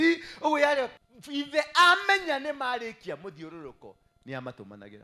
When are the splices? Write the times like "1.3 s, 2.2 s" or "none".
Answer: 0.9 s